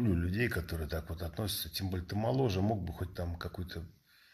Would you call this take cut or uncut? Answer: uncut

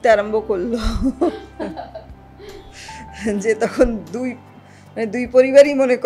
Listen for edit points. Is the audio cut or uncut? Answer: uncut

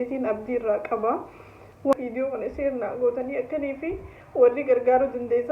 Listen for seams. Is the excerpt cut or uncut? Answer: cut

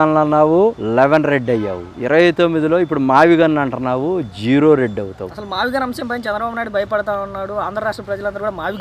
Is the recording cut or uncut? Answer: uncut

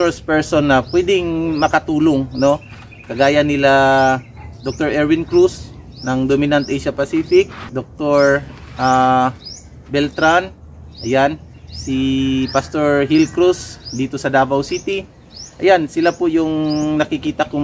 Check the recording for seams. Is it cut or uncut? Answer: uncut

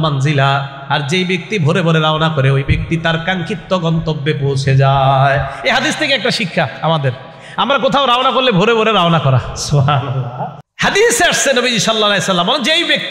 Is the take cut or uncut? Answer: cut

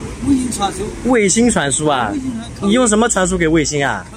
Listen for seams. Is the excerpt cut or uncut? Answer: uncut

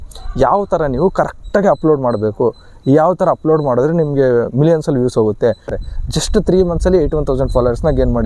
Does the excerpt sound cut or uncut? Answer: cut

